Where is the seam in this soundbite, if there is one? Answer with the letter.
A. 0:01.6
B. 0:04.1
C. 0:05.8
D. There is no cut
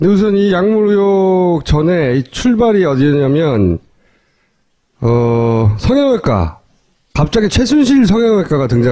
C